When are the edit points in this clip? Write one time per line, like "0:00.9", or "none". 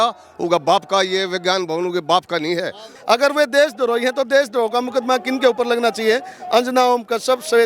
0:02.8

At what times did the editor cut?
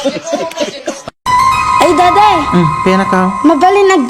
0:01.1

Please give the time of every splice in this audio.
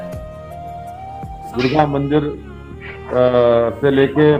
0:01.5

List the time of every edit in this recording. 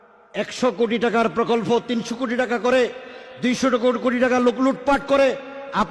none

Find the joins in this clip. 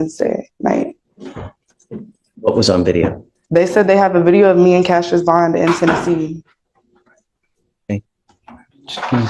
none

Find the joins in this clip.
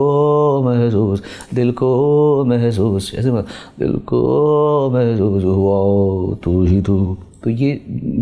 none

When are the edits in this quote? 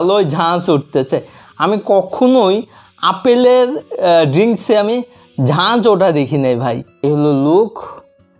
0:07.0

